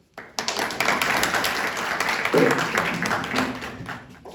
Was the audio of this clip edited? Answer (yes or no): no